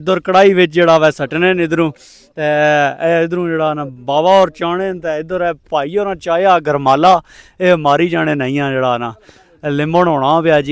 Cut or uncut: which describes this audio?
uncut